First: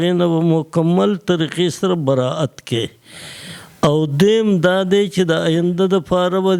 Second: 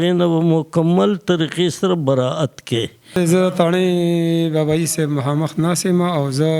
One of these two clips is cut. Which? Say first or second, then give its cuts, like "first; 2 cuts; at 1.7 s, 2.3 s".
second; 1 cut; at 3.0 s